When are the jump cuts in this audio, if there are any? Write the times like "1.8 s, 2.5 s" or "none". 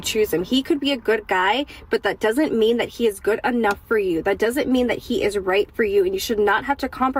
4.4 s, 6.2 s